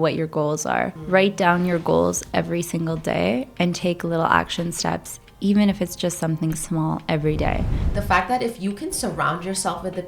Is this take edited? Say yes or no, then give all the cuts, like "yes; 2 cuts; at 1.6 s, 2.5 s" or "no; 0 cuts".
yes; 2 cuts; at 1.0 s, 7.8 s